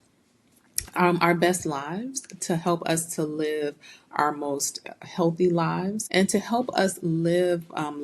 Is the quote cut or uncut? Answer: cut